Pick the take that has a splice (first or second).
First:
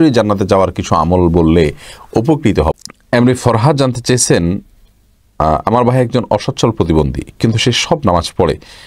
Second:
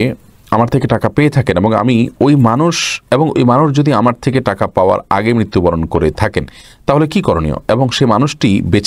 first